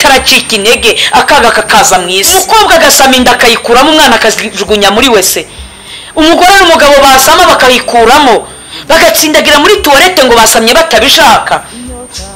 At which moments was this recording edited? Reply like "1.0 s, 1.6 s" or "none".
2.3 s